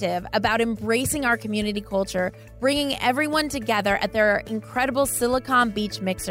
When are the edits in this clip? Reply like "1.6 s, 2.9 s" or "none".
none